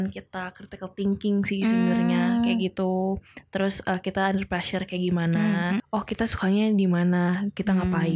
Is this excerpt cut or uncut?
cut